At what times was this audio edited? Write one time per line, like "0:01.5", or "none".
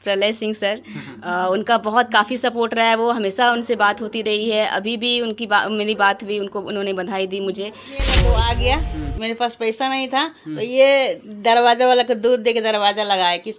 0:08.1